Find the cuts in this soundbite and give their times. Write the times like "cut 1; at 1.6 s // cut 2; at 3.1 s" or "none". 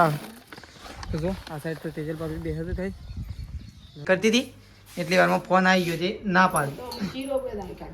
cut 1; at 4.0 s